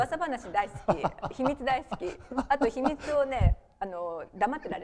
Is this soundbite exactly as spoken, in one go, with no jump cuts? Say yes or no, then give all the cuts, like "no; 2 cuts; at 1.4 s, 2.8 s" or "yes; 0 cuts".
yes; 0 cuts